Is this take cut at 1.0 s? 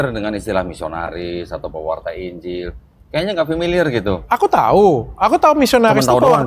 no; 0 cuts

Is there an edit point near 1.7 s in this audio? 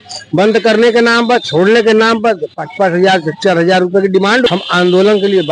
no; 1 cut; at 4.5 s

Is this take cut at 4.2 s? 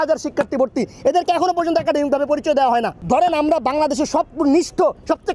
no; 1 cut; at 3.0 s

